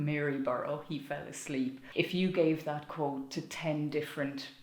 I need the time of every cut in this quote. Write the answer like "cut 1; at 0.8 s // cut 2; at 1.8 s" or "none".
cut 1; at 1.8 s // cut 2; at 3.2 s